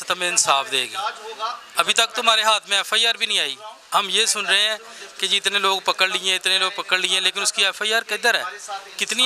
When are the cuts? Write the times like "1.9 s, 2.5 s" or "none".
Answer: none